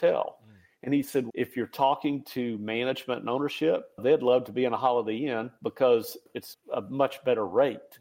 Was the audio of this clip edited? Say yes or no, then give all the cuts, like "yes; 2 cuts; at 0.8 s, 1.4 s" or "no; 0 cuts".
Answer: yes; 3 cuts; at 1.3 s, 4.0 s, 6.4 s